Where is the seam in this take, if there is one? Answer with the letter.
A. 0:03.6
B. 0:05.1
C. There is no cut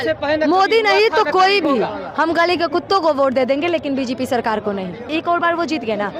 B